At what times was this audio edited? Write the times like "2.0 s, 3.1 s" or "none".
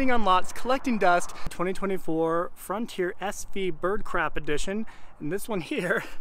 1.5 s